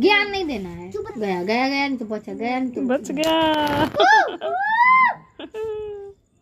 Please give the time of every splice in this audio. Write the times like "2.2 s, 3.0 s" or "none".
1.1 s